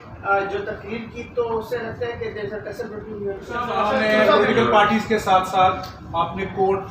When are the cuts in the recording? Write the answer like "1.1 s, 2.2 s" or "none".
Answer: 3.7 s